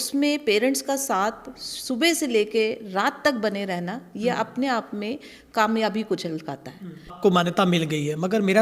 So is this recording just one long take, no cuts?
no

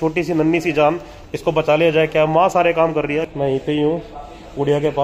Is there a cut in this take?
yes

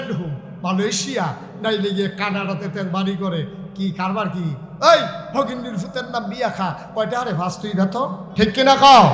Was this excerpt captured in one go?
no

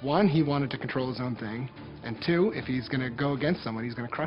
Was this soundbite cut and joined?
no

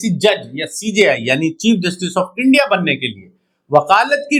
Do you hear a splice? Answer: no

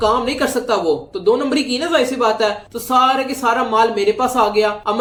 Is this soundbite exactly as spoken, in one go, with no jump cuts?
yes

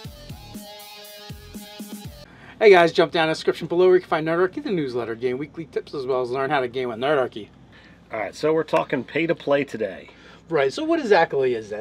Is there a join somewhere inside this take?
yes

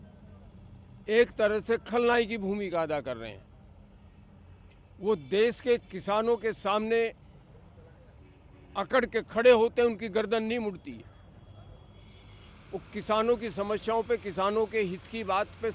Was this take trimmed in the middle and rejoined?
no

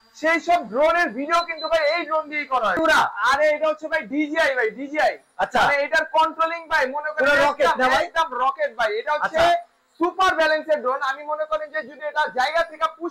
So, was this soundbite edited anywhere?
yes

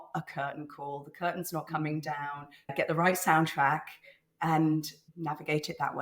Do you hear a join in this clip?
yes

